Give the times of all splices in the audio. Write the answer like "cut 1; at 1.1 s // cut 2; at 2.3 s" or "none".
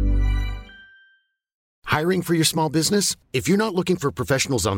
cut 1; at 1.6 s